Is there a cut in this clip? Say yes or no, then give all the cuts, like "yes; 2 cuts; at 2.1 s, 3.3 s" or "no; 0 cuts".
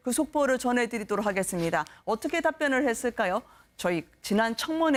no; 0 cuts